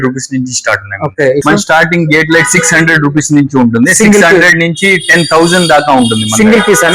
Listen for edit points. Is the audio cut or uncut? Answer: cut